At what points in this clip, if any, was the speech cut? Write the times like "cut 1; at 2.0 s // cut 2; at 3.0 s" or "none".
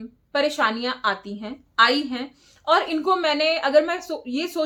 none